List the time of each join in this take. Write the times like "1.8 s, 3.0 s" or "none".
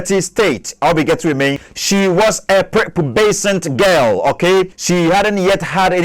1.7 s, 4.8 s